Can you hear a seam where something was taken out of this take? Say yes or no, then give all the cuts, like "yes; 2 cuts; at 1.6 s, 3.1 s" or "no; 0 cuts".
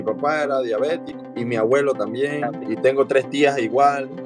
yes; 2 cuts; at 1.1 s, 2.6 s